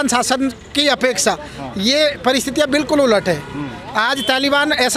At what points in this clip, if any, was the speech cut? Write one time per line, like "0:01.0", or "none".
none